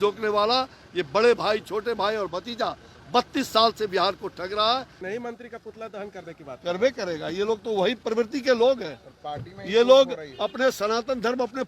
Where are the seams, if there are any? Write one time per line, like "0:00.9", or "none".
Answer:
0:05.0